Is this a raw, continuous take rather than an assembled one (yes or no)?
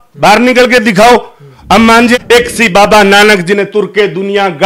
no